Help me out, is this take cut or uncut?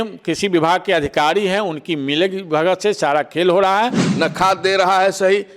cut